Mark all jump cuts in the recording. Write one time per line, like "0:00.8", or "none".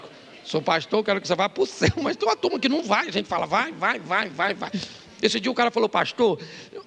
none